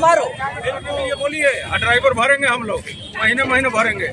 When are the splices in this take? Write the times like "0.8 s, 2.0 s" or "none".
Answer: 0.9 s